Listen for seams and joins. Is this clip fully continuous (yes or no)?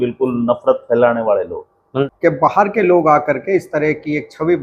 no